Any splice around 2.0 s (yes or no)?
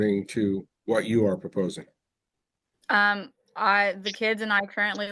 no